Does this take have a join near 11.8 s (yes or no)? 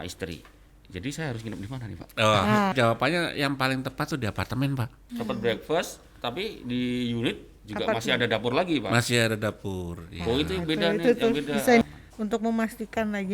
yes